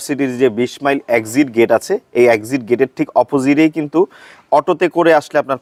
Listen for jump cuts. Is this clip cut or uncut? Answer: uncut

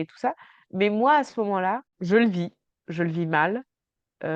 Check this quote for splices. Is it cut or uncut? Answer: cut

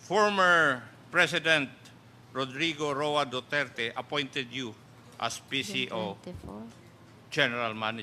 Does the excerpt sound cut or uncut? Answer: uncut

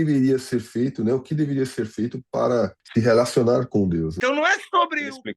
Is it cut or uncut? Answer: cut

